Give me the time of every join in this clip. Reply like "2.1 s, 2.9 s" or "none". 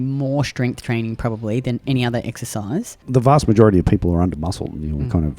3.0 s